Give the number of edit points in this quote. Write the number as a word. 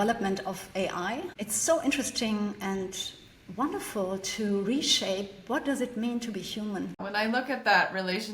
one